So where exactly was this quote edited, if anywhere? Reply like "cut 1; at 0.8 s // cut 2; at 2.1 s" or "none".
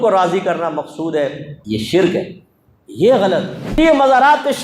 cut 1; at 1.5 s // cut 2; at 3.6 s